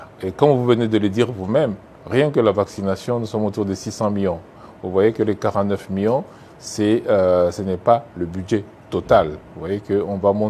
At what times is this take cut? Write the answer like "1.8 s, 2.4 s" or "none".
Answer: none